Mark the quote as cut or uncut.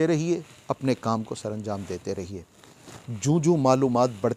uncut